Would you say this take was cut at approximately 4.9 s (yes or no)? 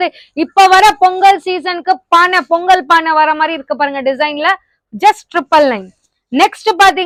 no